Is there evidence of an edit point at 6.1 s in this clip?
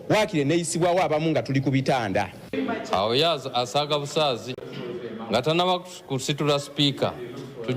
no; 1 cut; at 2.5 s

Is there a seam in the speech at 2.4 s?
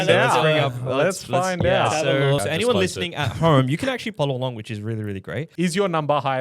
yes; 3 cuts; at 2.4 s, 4.1 s, 5.4 s

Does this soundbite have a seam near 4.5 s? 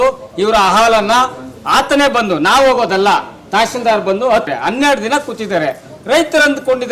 yes; 1 cut; at 4.5 s

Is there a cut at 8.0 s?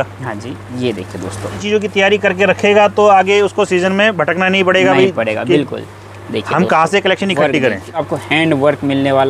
yes; 2 cuts; at 1.6 s, 8.0 s

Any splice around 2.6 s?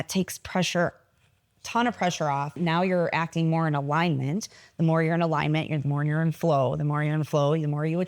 yes; 1 cut; at 2.6 s

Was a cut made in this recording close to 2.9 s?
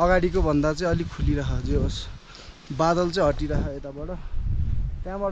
no; 0 cuts

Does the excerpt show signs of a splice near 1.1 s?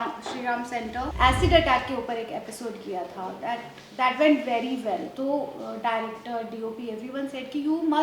yes; 1 cut; at 1.1 s

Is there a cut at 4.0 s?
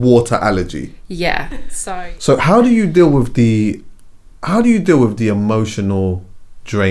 no; 1 cut; at 1.7 s

